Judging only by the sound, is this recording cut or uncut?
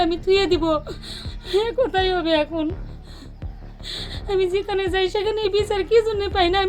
uncut